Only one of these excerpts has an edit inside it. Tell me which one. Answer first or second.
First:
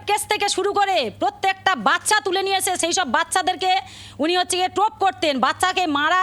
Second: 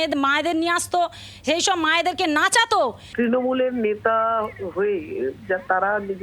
second